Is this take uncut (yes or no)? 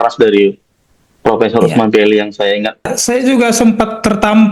no